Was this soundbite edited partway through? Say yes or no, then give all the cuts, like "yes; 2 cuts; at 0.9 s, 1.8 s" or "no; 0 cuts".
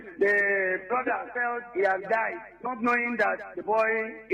no; 0 cuts